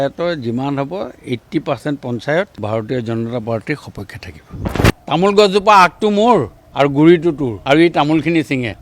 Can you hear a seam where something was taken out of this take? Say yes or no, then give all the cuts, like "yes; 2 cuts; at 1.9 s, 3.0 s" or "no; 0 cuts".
yes; 3 cuts; at 2.6 s, 4.6 s, 7.5 s